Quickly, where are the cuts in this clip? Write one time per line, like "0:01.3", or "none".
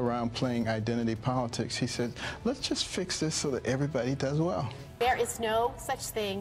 0:04.8